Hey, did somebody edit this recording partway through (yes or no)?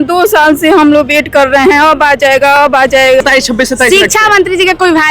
yes